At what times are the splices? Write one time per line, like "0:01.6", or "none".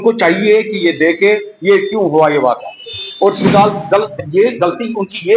0:03.5